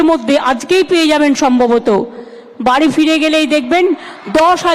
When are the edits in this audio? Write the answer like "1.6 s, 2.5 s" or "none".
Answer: none